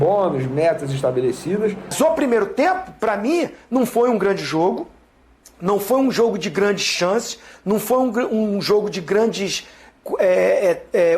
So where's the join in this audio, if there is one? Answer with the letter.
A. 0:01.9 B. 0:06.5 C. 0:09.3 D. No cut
A